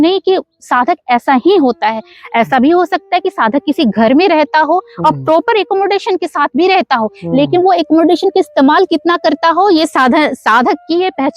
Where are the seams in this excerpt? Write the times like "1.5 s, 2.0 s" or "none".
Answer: none